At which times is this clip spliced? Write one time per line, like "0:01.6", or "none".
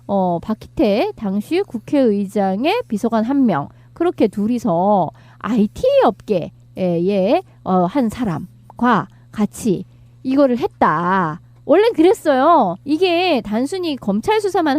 0:04.3